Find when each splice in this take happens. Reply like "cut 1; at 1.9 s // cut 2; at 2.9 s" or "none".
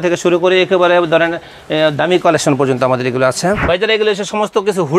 cut 1; at 3.6 s